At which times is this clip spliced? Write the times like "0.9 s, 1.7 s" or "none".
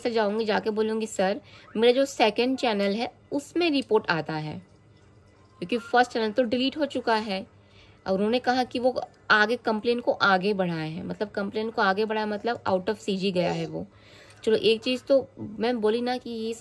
none